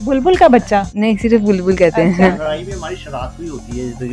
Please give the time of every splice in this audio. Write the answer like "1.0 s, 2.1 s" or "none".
2.3 s